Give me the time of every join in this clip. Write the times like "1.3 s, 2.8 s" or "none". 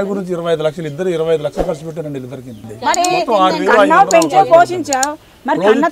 2.6 s